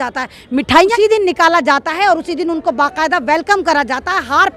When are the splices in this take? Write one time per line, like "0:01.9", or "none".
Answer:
0:00.9